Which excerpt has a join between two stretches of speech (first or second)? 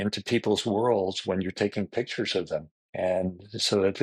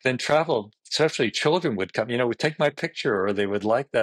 first